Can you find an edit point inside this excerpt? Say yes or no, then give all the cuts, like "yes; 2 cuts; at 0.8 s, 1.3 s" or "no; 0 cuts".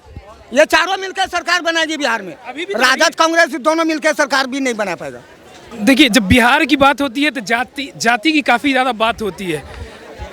no; 0 cuts